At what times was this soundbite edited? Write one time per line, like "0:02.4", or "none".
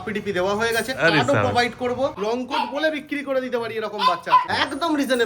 0:02.2
0:04.5